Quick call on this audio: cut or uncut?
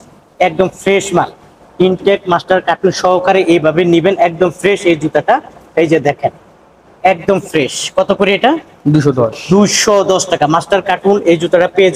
uncut